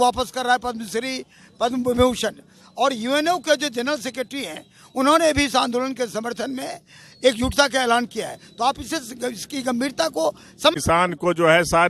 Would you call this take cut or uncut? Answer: cut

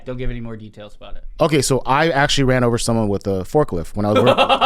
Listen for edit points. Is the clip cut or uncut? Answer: uncut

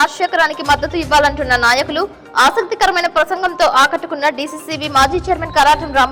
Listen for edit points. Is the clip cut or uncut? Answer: uncut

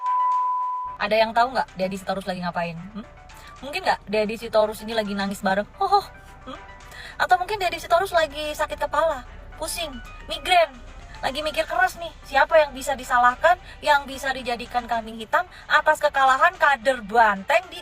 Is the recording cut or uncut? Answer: cut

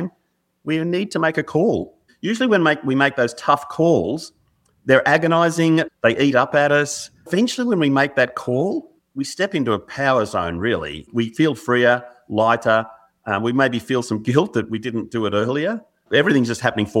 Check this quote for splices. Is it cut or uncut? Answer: cut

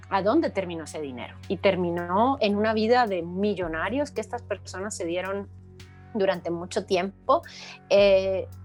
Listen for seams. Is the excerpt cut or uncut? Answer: uncut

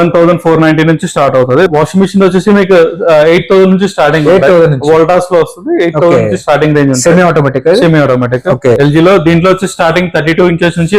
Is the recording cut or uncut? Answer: cut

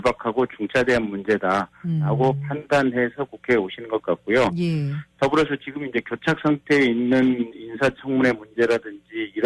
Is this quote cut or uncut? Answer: cut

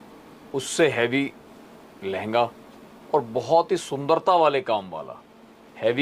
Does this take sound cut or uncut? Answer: uncut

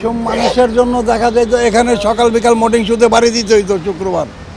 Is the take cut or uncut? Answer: uncut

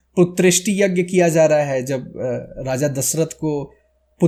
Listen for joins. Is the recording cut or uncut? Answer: uncut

